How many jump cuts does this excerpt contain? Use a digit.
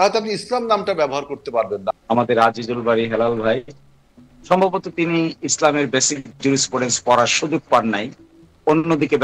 1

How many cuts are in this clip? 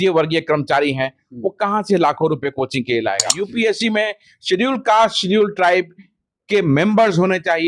1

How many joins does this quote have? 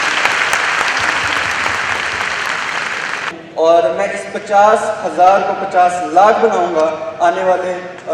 1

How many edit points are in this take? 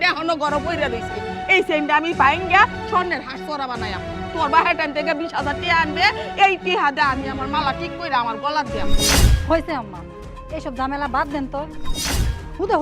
1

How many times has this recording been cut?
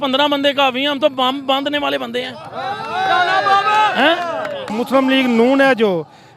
1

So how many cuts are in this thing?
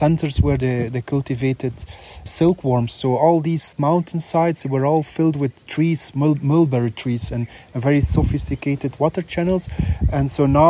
1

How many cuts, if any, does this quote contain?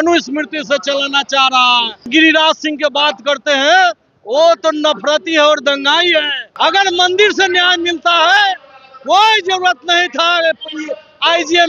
2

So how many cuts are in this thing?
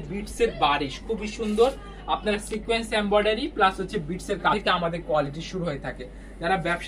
1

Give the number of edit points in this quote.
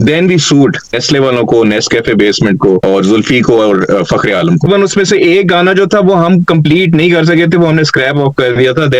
3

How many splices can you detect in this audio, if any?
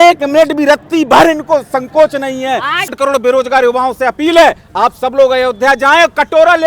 1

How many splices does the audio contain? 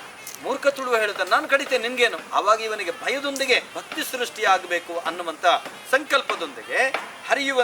2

